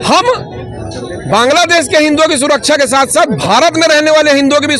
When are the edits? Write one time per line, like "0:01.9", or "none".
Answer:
none